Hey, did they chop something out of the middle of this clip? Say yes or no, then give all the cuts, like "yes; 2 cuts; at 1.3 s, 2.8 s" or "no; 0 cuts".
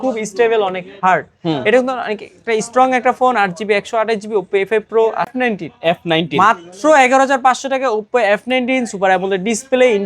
yes; 1 cut; at 5.3 s